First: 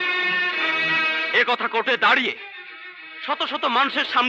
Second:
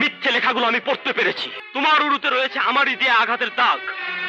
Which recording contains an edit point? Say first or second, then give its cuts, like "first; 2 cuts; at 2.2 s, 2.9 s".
second; 1 cut; at 1.5 s